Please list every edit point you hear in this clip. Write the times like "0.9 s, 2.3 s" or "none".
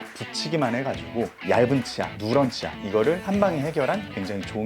1.4 s

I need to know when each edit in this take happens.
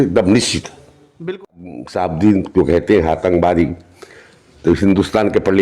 1.5 s

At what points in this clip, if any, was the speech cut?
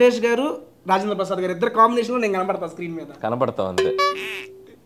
none

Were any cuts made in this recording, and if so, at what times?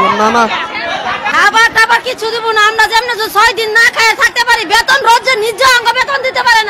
1.3 s

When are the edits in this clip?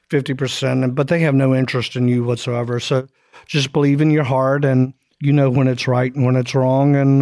5.1 s

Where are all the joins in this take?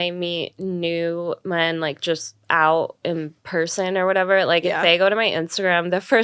none

